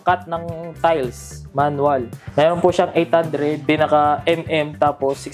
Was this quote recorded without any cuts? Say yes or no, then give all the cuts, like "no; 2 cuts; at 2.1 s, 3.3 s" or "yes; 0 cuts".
no; 2 cuts; at 2.2 s, 3.6 s